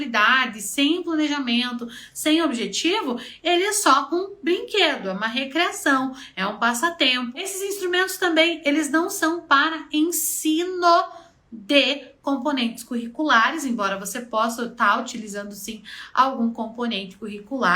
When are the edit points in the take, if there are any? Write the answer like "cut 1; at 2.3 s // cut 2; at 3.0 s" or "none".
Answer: cut 1; at 7.5 s